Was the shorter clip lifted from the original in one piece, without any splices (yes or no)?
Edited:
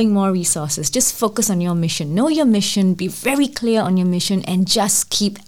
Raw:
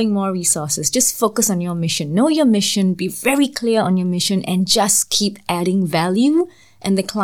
yes